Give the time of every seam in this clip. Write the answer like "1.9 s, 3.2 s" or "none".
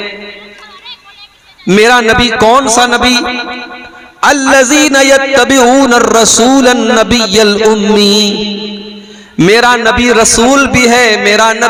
none